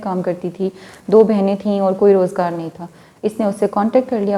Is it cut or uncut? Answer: uncut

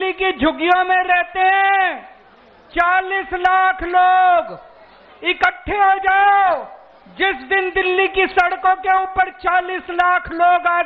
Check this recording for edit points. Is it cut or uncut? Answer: uncut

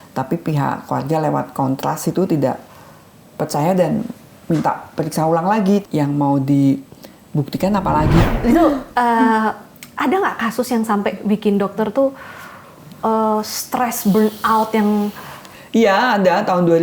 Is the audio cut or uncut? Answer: cut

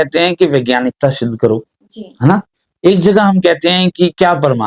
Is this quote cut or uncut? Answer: uncut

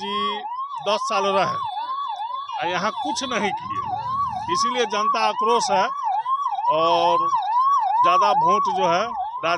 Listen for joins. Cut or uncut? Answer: uncut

